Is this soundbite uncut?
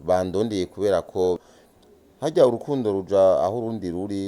no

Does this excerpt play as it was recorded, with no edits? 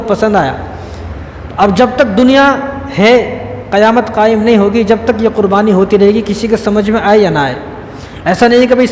yes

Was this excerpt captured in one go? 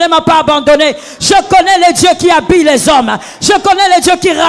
yes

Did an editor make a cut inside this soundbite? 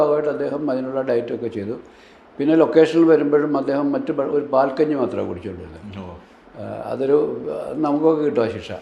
no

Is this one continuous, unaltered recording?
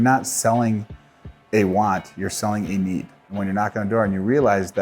no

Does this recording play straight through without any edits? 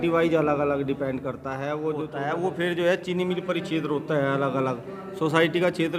no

